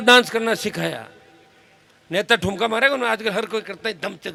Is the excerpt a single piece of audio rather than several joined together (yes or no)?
yes